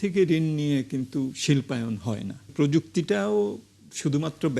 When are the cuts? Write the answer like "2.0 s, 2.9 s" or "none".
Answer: 2.5 s